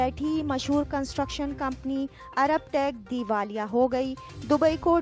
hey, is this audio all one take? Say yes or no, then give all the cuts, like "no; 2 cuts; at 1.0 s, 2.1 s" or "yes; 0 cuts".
yes; 0 cuts